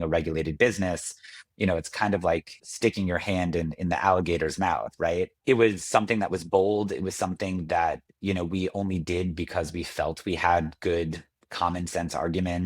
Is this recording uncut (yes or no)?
no